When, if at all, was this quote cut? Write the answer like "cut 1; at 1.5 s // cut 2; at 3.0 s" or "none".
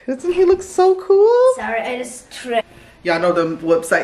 cut 1; at 2.6 s